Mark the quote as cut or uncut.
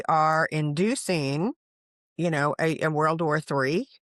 uncut